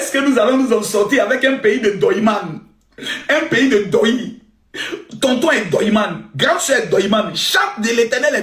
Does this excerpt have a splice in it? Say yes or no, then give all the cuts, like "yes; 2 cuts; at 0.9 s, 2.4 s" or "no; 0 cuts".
no; 0 cuts